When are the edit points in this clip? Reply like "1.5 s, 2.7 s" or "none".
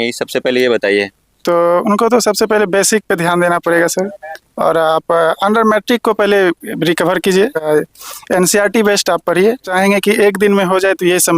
7.7 s, 9.7 s